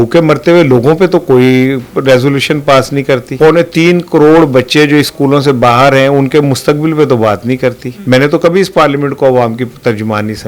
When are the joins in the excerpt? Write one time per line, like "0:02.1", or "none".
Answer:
0:03.3
0:07.9

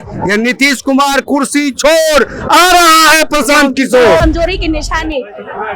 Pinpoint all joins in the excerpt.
0:04.2

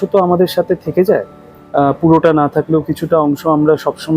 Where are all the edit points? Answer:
none

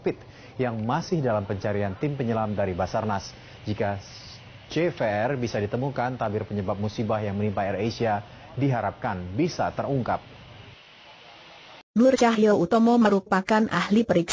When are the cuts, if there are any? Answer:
0:10.6

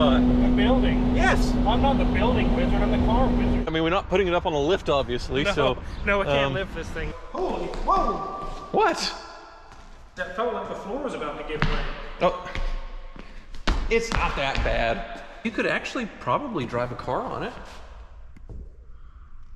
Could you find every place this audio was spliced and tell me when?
0:03.6
0:07.1
0:15.4

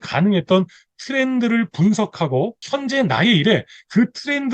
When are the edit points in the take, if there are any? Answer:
0:02.6

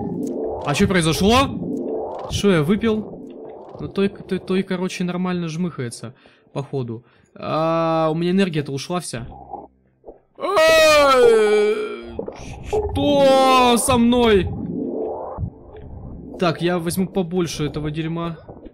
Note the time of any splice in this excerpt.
none

